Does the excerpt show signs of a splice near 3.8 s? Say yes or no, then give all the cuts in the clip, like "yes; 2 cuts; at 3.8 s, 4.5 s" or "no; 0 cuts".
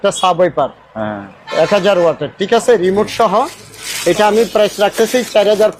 no; 0 cuts